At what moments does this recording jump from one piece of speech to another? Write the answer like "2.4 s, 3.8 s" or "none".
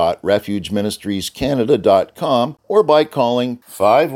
2.6 s

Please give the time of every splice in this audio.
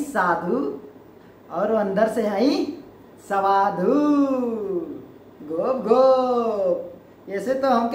none

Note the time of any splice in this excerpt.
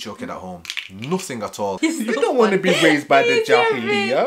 1.7 s

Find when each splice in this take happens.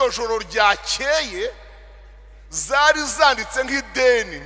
none

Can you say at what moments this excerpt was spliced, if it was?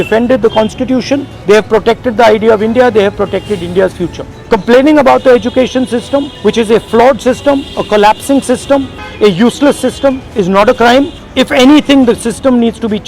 1.3 s, 4.3 s, 6.3 s, 9.0 s, 11.2 s

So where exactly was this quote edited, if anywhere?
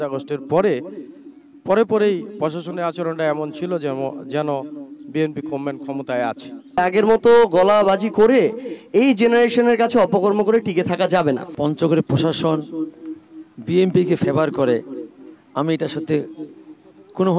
6.8 s, 11.5 s

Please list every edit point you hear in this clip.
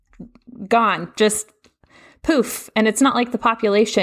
none

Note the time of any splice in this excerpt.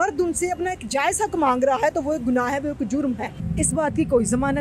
3.4 s

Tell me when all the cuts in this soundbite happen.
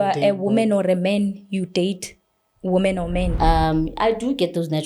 3.3 s

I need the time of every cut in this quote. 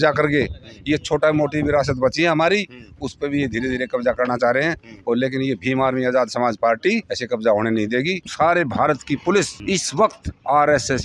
7.1 s, 8.2 s, 9.9 s

